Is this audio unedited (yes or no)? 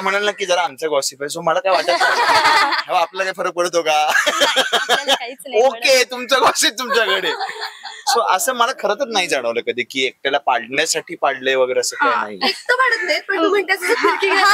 yes